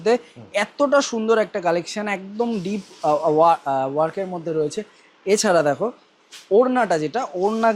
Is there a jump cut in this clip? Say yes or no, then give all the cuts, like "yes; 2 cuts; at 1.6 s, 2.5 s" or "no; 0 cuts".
no; 0 cuts